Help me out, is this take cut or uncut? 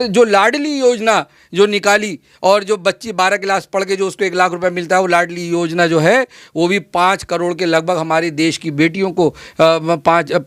uncut